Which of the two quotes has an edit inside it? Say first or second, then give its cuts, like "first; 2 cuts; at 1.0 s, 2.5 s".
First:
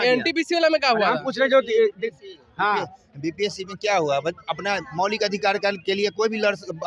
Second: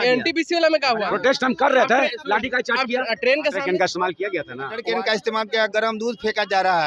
second; 3 cuts; at 1.1 s, 3.6 s, 4.8 s